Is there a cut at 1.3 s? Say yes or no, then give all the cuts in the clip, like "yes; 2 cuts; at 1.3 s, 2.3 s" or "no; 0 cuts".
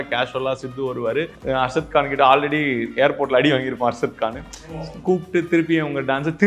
yes; 1 cut; at 1.3 s